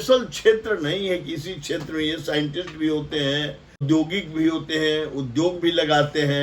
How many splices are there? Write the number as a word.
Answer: one